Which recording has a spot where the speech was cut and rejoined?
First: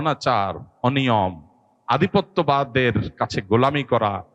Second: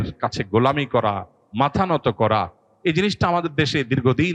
second; 1 cut; at 2.6 s

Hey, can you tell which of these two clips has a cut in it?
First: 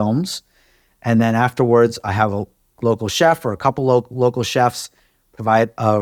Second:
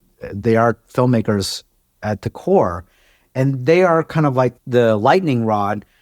second; 1 cut; at 4.6 s

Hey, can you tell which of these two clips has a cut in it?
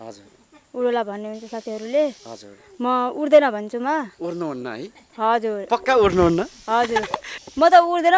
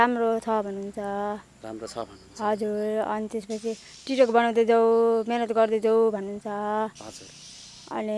first; 1 cut; at 7.3 s

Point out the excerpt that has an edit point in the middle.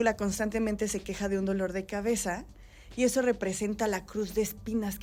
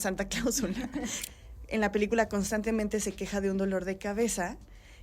second; 1 cut; at 1.2 s

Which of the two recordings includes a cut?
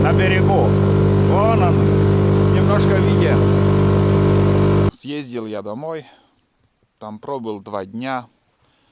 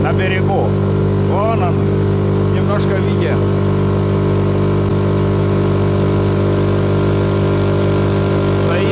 first; 1 cut; at 4.9 s

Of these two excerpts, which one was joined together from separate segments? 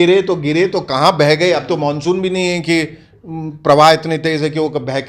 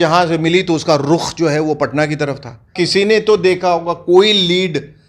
second; 1 cut; at 2.7 s

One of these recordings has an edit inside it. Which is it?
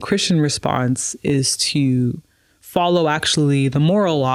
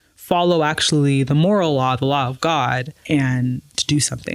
second; 1 cut; at 3.0 s

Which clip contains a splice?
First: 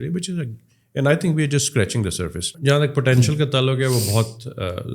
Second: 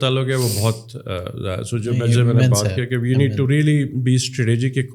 first; 1 cut; at 2.5 s

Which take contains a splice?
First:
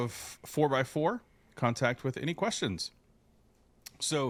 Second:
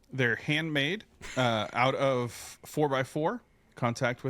second; 1 cut; at 1.2 s

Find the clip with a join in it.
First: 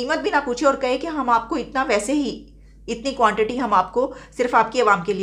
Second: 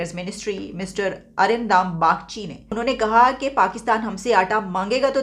second; 1 cut; at 2.7 s

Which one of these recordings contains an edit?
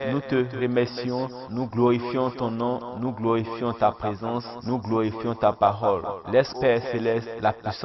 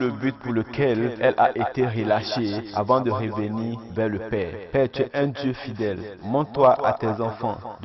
first; 1 cut; at 6.5 s

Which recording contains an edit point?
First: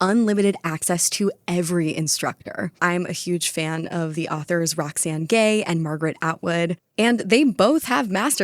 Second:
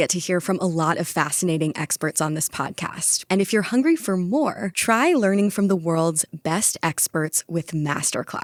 first; 1 cut; at 2.7 s

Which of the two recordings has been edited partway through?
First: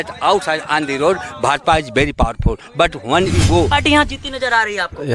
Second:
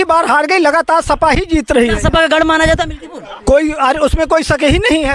first; 1 cut; at 3.7 s

